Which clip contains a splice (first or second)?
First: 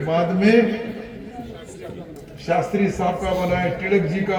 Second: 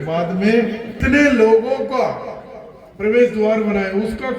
second